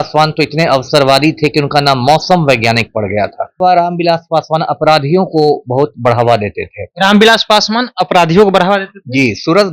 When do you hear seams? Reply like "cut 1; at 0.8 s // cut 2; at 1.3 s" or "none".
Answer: cut 1; at 3.6 s